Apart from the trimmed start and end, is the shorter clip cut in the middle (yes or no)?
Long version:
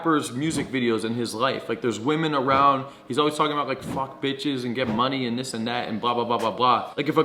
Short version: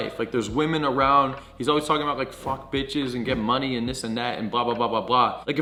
no